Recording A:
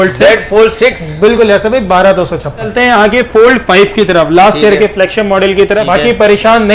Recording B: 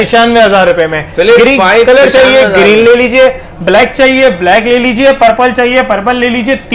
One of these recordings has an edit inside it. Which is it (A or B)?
A